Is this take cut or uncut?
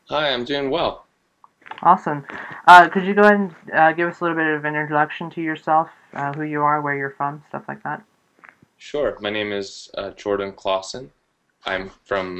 uncut